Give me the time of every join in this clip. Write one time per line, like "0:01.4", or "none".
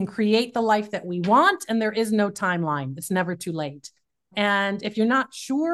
0:04.3